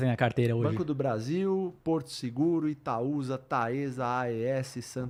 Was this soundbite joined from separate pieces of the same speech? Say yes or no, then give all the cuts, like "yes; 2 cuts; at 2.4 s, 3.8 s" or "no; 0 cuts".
no; 0 cuts